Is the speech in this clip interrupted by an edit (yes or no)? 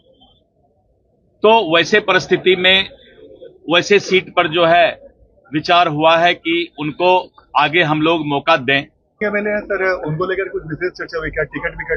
yes